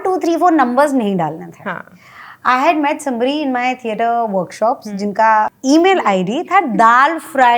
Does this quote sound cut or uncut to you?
uncut